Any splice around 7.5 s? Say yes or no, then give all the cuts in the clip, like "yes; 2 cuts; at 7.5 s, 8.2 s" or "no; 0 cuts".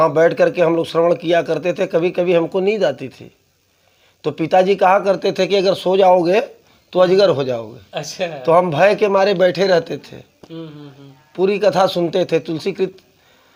no; 0 cuts